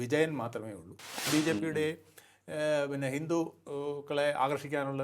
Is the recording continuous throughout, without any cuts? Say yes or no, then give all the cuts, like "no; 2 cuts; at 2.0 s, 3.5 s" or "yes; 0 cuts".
no; 1 cut; at 1.2 s